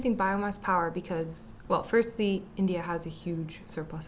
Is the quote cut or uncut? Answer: uncut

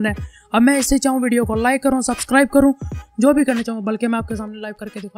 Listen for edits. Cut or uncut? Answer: uncut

